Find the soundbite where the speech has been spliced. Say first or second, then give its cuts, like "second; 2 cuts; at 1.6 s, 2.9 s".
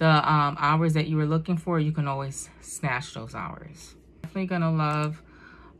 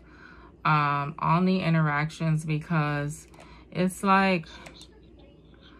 first; 1 cut; at 4.3 s